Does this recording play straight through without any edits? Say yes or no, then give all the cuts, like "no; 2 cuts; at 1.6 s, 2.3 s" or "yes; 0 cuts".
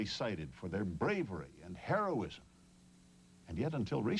yes; 0 cuts